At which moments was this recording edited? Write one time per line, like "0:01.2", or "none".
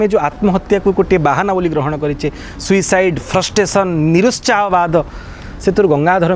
none